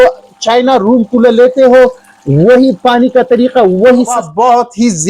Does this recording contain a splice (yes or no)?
yes